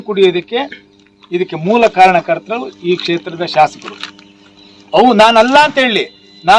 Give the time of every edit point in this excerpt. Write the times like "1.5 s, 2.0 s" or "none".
none